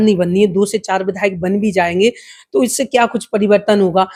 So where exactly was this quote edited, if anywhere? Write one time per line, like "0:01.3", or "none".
none